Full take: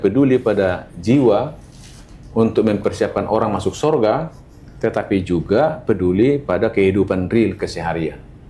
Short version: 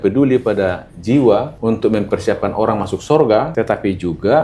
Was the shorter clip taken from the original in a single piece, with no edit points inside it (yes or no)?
no